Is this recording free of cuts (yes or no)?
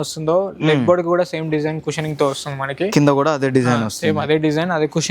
yes